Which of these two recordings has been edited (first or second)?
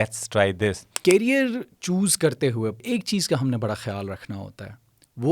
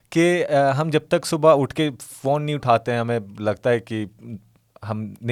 first